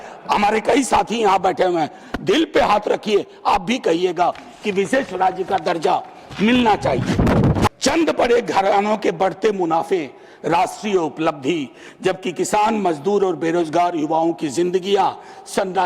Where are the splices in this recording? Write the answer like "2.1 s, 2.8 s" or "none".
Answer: 7.7 s